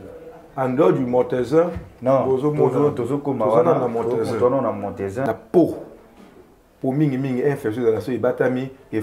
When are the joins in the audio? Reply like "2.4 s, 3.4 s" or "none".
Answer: 5.3 s